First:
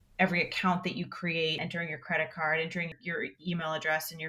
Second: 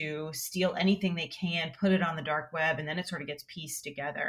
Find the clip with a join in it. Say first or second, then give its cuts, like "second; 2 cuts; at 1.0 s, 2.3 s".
first; 2 cuts; at 1.6 s, 3.0 s